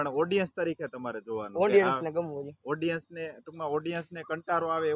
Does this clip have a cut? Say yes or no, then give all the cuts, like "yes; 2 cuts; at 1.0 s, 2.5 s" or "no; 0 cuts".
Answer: no; 0 cuts